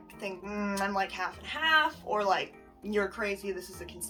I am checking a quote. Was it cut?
no; 0 cuts

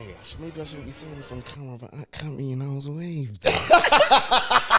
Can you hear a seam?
no; 0 cuts

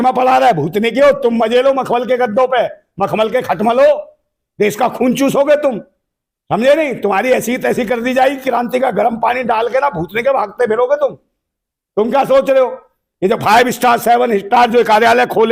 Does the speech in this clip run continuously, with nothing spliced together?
yes; 0 cuts

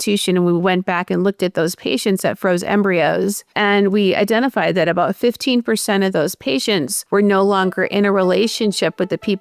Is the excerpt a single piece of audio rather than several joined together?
no; 2 cuts; at 3.5 s, 7.0 s

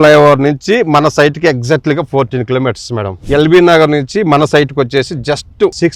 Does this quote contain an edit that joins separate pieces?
no; 0 cuts

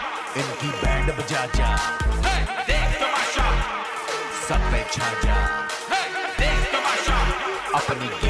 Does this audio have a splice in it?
no; 0 cuts

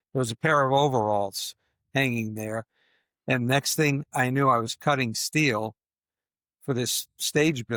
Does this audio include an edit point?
no; 0 cuts

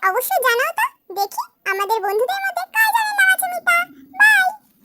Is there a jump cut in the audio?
no; 0 cuts

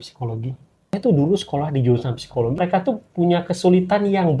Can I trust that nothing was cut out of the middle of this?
no; 2 cuts; at 0.9 s, 2.6 s

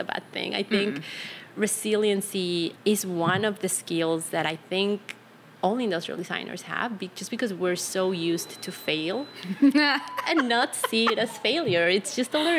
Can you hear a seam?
no; 0 cuts

